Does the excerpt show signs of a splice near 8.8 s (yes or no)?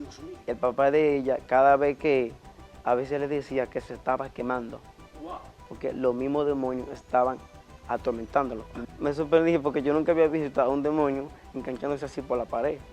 yes